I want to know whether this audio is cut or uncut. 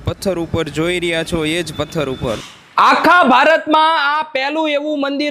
cut